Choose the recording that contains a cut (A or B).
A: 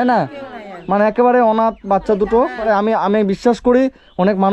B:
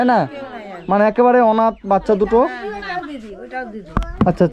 A